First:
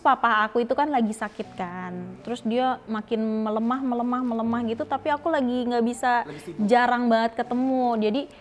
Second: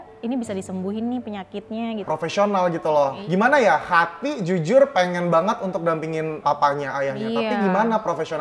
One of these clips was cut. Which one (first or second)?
second